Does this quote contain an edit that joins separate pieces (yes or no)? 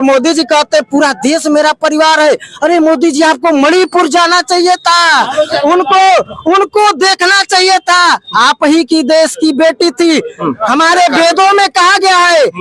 no